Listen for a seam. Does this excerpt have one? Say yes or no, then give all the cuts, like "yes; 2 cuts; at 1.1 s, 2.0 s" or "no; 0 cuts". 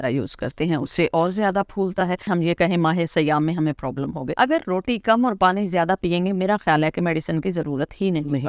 yes; 2 cuts; at 2.3 s, 4.3 s